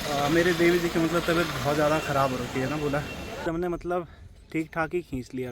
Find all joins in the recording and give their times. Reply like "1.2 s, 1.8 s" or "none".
3.4 s